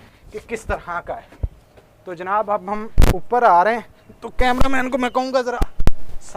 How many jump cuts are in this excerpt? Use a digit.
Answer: 0